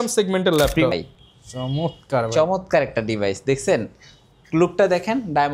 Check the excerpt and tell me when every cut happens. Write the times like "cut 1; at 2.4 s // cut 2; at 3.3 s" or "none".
cut 1; at 0.9 s

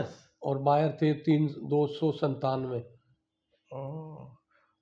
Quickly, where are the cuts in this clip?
none

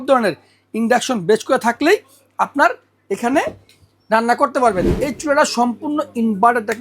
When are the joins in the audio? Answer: cut 1; at 4.8 s

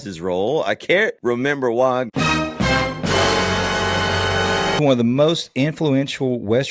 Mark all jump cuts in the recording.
cut 1; at 1.2 s // cut 2; at 4.8 s

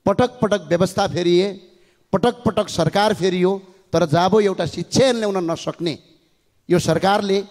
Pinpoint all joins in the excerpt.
none

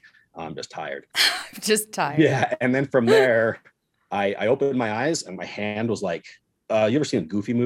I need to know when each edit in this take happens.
cut 1; at 1.4 s

